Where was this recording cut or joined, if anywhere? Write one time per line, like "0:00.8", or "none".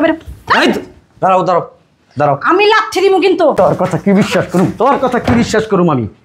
0:03.5